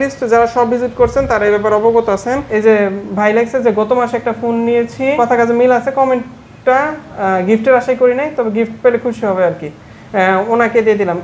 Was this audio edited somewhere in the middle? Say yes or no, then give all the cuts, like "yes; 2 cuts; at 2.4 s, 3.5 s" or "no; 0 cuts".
yes; 2 cuts; at 2.4 s, 5.1 s